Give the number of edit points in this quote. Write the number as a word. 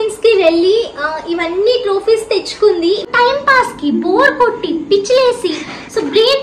one